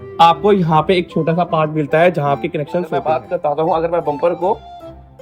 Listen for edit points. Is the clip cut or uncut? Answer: cut